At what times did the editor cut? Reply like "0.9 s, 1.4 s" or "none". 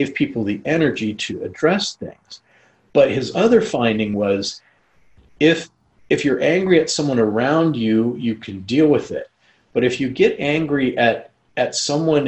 4.1 s